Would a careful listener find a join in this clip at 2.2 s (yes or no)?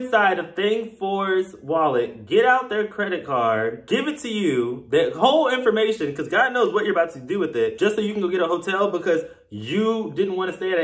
no